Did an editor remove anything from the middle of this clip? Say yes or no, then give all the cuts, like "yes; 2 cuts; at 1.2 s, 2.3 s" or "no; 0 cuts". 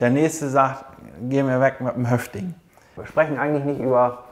yes; 1 cut; at 3.0 s